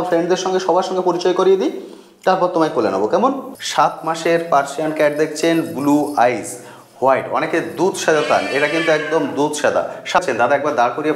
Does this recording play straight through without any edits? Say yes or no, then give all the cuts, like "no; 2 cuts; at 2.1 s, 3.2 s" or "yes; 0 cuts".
no; 2 cuts; at 3.5 s, 10.2 s